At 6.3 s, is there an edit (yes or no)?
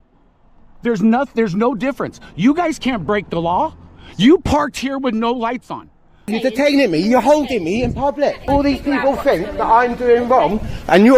yes